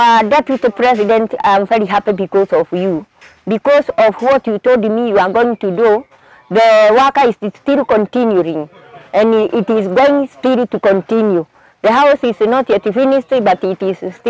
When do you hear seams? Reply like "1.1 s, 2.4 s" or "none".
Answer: none